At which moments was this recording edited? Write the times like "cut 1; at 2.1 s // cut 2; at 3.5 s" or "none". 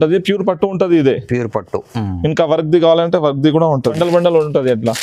cut 1; at 4.0 s